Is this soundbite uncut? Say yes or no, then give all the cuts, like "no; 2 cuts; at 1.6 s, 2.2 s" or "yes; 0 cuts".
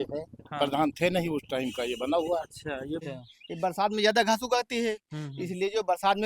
no; 1 cut; at 3.1 s